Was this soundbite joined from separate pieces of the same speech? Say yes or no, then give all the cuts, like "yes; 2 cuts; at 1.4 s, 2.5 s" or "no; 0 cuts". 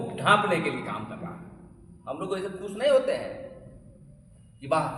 no; 0 cuts